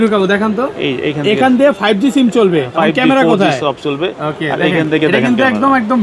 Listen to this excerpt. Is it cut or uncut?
uncut